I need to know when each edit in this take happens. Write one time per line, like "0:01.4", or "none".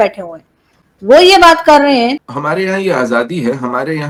none